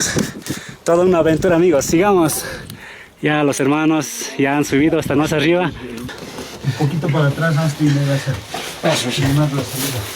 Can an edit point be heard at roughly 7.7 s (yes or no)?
no